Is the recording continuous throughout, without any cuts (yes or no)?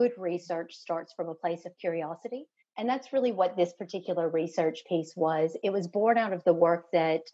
no